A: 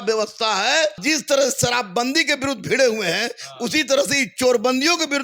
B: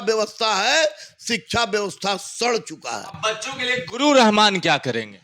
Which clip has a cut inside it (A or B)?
A